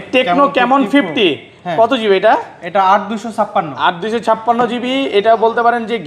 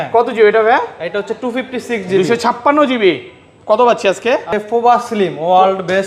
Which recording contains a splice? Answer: second; 1 cut; at 4.5 s

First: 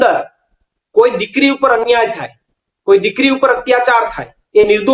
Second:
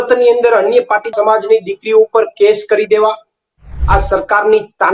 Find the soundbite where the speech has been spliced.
second; 1 cut; at 3.8 s

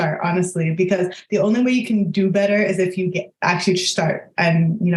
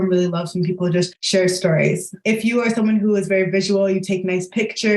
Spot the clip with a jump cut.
second; 2 cuts; at 1.2 s, 2.1 s

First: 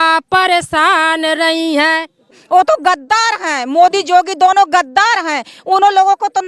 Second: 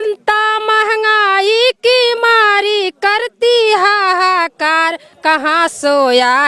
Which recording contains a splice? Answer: first; 1 cut; at 2.3 s

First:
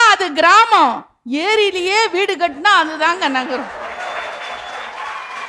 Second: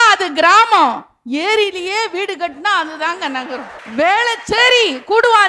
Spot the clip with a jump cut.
second; 1 cut; at 3.8 s

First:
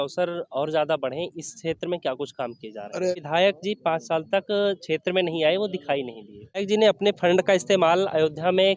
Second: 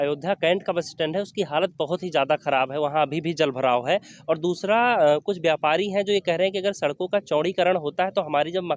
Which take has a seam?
first; 2 cuts; at 3.1 s, 6.6 s

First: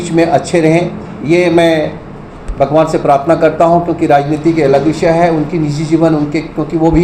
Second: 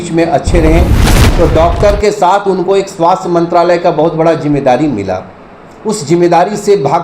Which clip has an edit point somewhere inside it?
second; 1 cut; at 1.1 s

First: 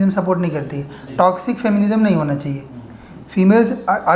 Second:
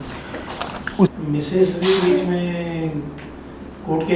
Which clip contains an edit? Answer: second; 1 cut; at 1.1 s

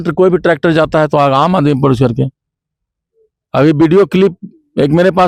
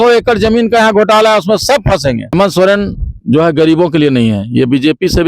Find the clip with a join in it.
second; 1 cut; at 2.3 s

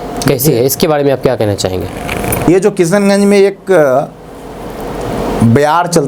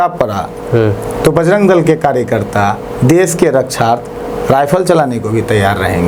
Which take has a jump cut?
first; 1 cut; at 2.5 s

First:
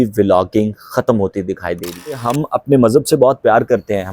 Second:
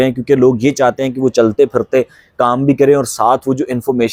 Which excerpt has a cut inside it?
first; 1 cut; at 2.2 s

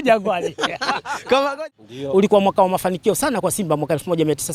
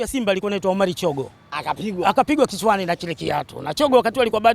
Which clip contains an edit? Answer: first; 1 cut; at 1.6 s

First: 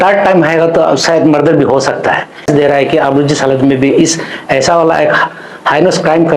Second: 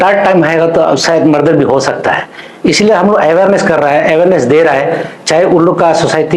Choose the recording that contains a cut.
first; 1 cut; at 2.5 s

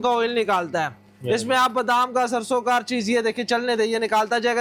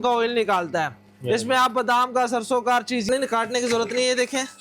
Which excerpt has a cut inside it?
second; 1 cut; at 3.0 s

